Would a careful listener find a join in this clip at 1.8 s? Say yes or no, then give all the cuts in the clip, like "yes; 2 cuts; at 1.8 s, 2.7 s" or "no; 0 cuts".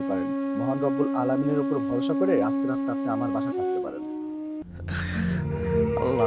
no; 1 cut; at 4.7 s